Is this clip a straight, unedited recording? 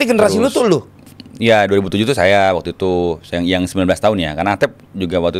yes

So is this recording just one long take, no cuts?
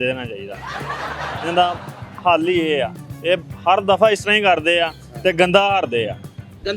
yes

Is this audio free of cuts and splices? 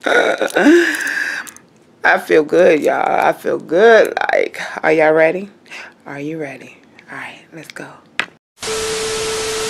no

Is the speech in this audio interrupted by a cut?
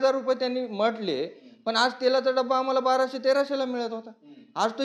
no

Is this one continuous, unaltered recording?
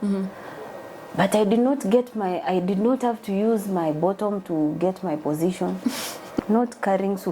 no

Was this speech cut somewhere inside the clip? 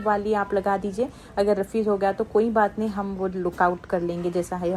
no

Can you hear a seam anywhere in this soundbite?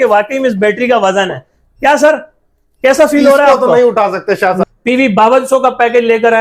yes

